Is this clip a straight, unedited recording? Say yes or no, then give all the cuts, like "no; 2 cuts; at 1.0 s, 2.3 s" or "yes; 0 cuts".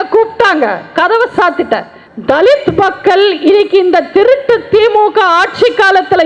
no; 1 cut; at 2.1 s